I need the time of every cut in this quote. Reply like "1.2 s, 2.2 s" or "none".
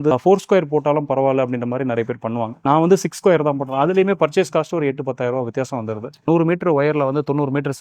2.6 s, 6.2 s